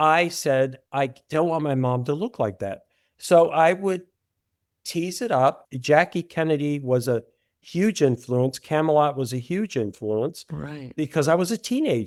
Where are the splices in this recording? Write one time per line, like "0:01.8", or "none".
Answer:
none

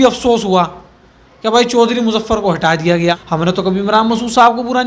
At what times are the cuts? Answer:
0:03.2

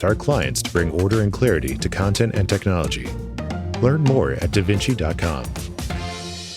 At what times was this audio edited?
0:05.5

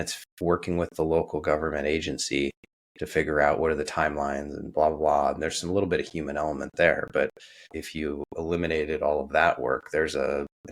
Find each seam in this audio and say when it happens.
none

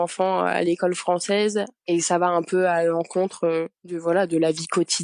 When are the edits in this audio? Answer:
0:01.8
0:03.8

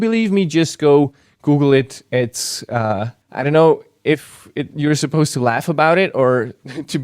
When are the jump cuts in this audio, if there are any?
0:03.2

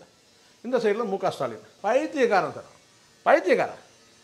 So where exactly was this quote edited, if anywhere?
0:01.7

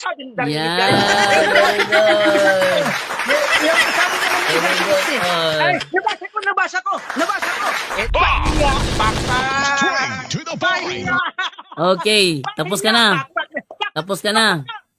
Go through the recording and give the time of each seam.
0:08.0

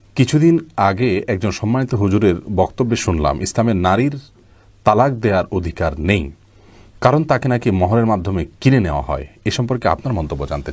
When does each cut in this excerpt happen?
none

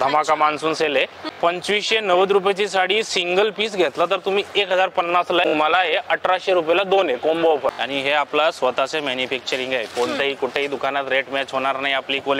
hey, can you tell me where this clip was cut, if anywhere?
0:01.3
0:05.5
0:07.8

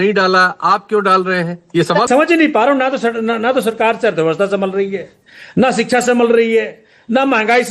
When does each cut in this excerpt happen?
0:02.1

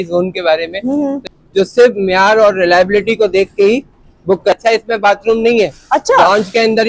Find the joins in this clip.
0:01.2
0:04.6

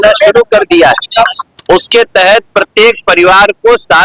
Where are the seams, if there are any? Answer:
0:01.5

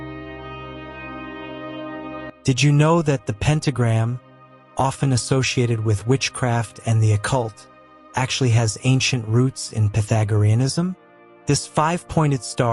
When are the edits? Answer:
0:01.1

